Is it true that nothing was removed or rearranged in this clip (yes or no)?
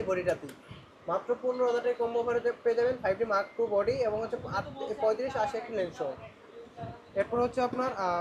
yes